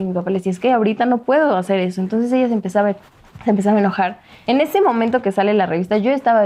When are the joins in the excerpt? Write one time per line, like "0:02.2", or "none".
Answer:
0:04.3